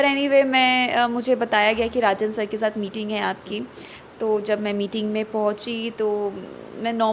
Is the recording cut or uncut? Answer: uncut